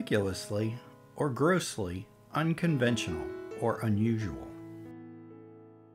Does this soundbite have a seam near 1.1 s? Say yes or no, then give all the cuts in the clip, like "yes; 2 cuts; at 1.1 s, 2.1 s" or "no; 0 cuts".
no; 1 cut; at 4.6 s